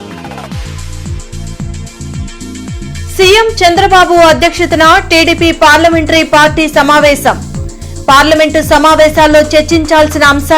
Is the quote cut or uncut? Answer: cut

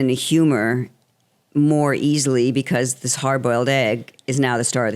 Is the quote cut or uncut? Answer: uncut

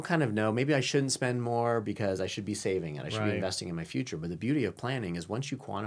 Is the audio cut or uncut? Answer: uncut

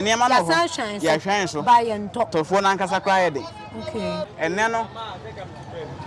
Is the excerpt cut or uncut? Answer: cut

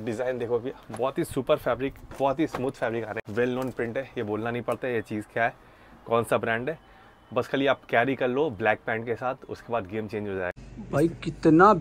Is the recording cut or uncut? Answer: cut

